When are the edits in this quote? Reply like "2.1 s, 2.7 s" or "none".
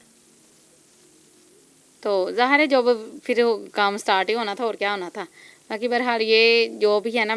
none